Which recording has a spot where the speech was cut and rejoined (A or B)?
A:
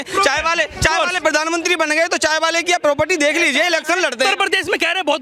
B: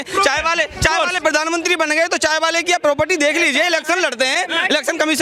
A